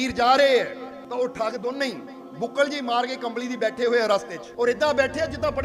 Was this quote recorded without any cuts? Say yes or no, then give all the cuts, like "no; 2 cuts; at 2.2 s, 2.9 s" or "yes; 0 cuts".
no; 2 cuts; at 1.0 s, 4.4 s